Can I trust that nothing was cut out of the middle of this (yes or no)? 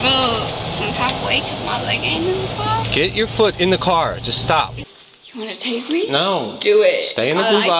no